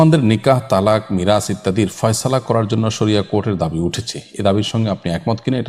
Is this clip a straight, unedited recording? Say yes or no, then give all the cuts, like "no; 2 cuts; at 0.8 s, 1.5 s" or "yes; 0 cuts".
yes; 0 cuts